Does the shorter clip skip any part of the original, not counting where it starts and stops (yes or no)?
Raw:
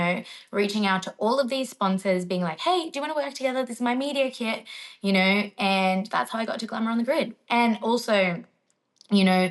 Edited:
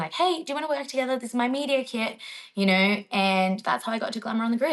no